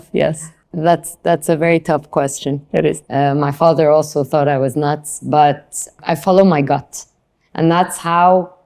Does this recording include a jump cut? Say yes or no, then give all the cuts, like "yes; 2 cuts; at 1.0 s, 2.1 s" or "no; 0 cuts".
yes; 2 cuts; at 3.0 s, 6.0 s